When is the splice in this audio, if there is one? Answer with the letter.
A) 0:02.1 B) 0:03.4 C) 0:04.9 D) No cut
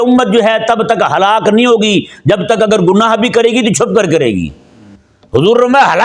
D